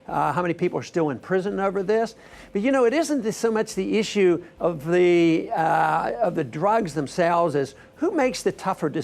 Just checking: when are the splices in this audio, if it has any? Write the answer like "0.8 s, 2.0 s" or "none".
4.3 s